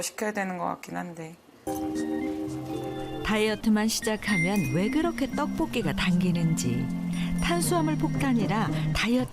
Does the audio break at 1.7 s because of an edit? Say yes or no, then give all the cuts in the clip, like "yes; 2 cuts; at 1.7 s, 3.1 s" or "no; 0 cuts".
yes; 1 cut; at 1.7 s